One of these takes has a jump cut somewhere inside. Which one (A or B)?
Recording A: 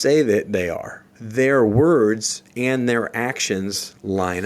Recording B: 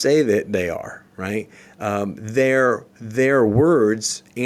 A